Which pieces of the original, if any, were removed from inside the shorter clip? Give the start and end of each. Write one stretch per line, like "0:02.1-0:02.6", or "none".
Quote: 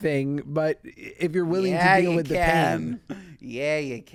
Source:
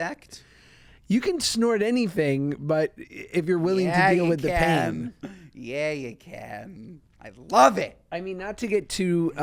none